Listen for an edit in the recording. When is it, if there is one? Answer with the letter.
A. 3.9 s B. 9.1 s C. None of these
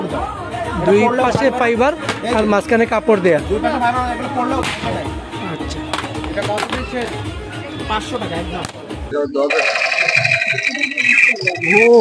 B